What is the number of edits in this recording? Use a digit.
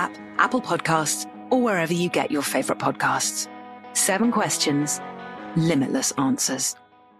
1